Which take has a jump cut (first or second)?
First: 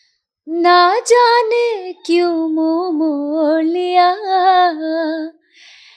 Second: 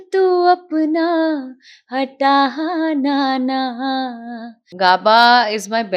second